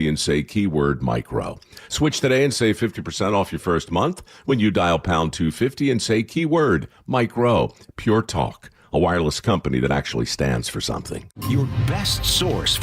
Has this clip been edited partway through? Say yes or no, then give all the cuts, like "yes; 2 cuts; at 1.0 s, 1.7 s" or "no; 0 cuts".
yes; 1 cut; at 11.3 s